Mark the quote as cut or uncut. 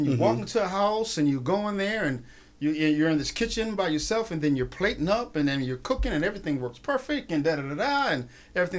uncut